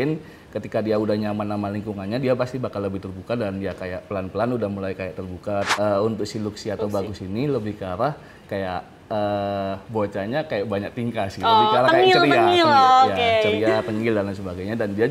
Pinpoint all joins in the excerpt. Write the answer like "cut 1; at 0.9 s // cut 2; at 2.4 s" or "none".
cut 1; at 5.7 s